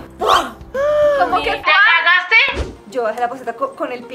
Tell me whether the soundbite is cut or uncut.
cut